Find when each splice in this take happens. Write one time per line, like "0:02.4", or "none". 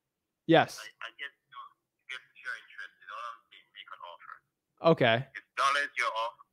none

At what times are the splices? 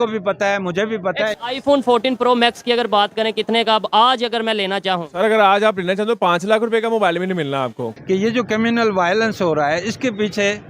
0:01.4
0:07.9

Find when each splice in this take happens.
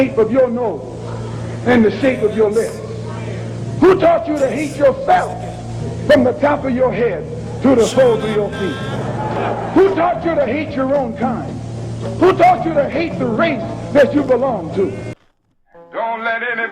0:15.2

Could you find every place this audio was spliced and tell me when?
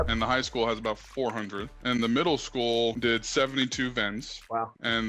0:03.0

